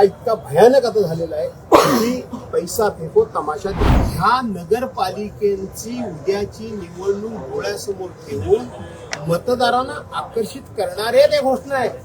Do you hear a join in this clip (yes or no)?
yes